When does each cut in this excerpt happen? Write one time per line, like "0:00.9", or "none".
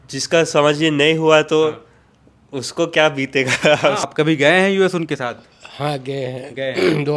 0:04.0